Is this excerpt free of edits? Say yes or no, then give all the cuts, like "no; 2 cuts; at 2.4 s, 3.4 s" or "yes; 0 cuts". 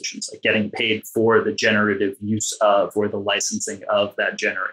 yes; 0 cuts